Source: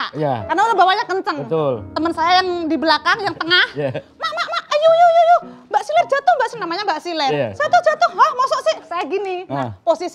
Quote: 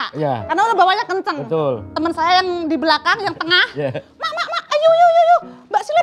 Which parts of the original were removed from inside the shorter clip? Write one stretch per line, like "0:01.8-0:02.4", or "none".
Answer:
none